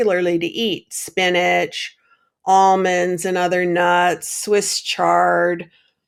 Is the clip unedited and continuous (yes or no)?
yes